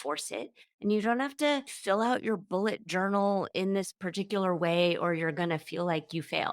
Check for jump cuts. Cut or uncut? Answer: cut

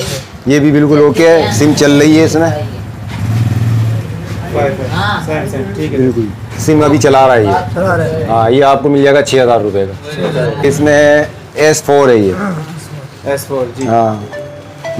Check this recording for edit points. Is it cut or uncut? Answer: cut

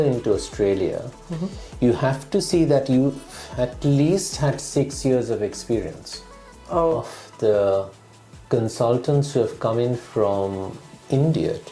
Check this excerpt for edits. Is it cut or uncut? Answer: cut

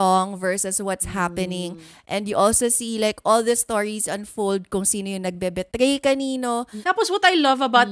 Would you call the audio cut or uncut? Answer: cut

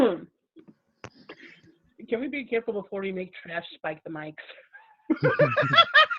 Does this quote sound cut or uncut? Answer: uncut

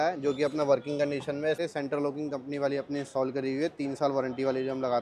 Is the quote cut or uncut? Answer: cut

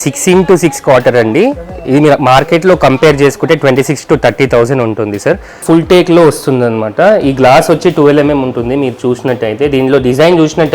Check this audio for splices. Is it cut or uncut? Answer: cut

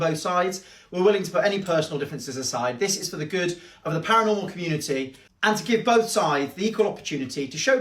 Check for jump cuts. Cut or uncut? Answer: uncut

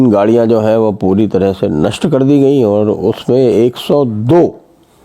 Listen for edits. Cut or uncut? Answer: uncut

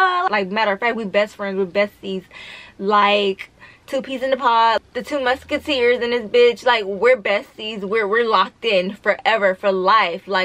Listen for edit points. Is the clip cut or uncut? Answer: uncut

